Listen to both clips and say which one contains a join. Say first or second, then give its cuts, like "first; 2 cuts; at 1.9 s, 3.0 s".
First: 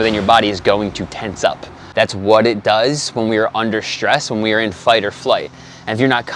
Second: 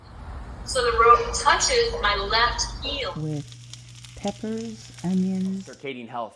first; 1 cut; at 1.8 s